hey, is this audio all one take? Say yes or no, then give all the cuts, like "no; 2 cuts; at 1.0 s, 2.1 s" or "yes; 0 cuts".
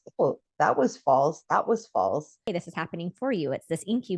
no; 1 cut; at 2.5 s